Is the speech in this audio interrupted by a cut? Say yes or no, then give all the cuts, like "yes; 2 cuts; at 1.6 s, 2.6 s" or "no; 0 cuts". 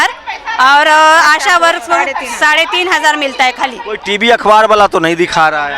yes; 1 cut; at 3.9 s